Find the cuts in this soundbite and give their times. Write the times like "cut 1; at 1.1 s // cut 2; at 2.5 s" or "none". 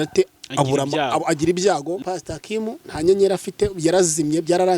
cut 1; at 2.0 s